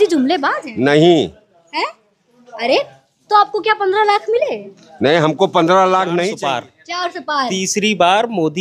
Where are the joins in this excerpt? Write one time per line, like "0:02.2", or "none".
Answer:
0:06.3